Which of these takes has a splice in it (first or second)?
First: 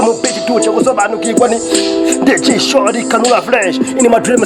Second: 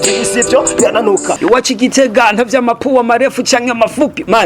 second